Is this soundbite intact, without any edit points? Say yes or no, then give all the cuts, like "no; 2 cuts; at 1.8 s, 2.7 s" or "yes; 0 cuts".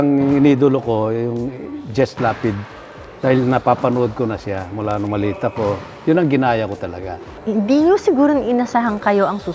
yes; 0 cuts